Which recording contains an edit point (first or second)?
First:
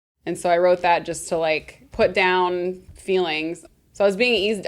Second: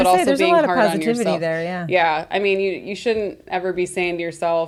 first